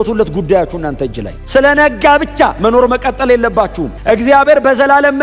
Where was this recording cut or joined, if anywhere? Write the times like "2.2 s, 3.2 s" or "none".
3.9 s